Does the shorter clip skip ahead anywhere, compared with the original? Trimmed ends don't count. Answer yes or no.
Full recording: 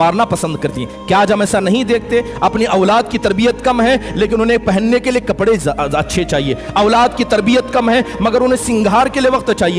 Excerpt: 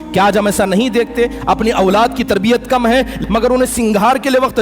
yes